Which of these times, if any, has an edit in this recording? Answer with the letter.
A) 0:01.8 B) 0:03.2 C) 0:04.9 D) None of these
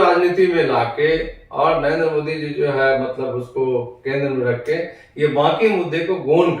D